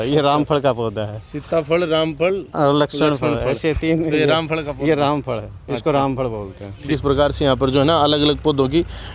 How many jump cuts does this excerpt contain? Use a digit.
1